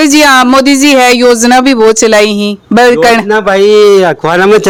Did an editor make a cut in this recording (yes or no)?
no